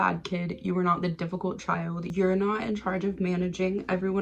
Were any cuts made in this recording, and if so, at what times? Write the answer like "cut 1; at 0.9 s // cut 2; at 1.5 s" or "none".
cut 1; at 2.0 s